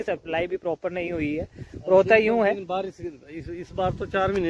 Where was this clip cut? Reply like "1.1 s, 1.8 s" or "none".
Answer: none